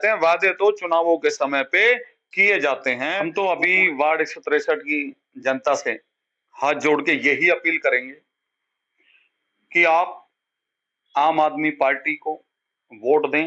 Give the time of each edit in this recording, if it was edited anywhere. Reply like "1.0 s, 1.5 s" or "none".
3.2 s

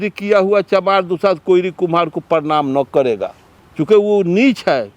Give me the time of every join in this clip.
none

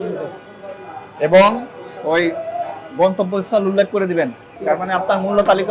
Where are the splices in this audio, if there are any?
4.5 s

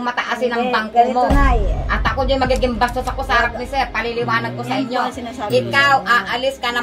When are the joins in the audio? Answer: none

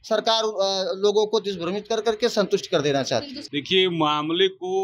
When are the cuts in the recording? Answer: 3.4 s

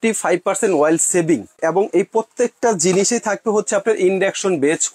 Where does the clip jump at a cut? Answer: 1.6 s

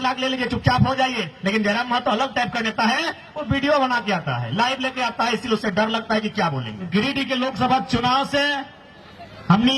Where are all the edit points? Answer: 6.9 s

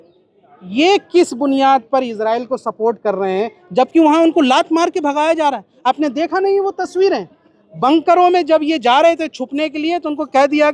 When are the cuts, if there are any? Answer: none

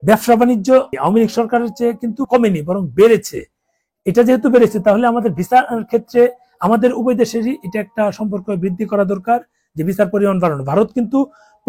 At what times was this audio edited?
0.9 s, 2.2 s

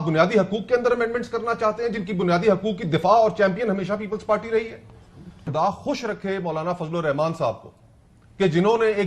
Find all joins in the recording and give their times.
5.5 s

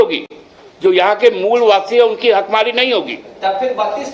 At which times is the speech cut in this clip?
none

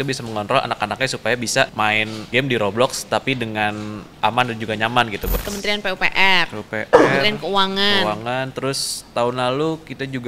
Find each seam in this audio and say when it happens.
2.3 s, 4.1 s, 5.3 s

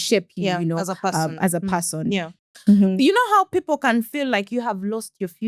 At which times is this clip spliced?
2.4 s

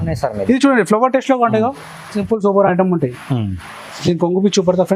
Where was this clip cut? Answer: 2.2 s

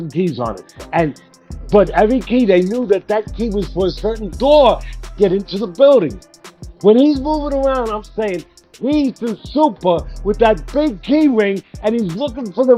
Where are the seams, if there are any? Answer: none

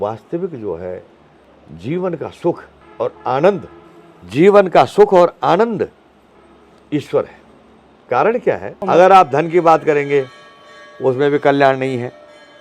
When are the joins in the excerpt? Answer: 8.7 s

